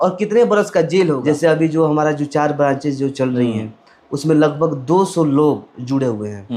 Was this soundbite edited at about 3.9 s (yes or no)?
no